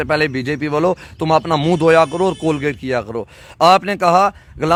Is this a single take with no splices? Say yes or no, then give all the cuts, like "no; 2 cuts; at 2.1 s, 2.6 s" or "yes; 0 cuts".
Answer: yes; 0 cuts